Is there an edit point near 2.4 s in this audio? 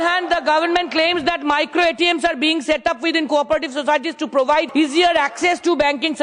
no; 1 cut; at 4.7 s

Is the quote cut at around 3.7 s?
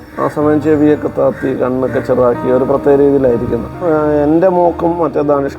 yes; 1 cut; at 3.7 s

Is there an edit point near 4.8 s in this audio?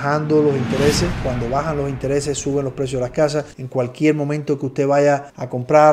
no; 2 cuts; at 1.2 s, 3.6 s

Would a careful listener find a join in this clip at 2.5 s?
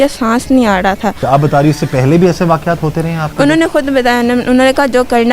no; 1 cut; at 1.2 s

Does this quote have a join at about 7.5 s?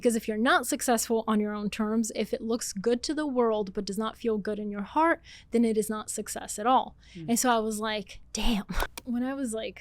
no; 1 cut; at 8.8 s

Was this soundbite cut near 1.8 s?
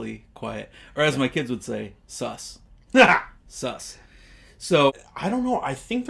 no; 1 cut; at 4.9 s

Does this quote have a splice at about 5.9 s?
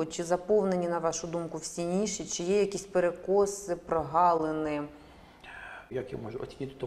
yes; 1 cut; at 5.9 s

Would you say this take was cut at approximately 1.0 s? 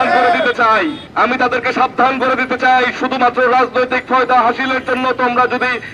yes; 1 cut; at 1.0 s

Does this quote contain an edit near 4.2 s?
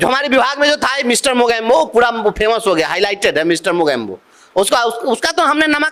no; 0 cuts

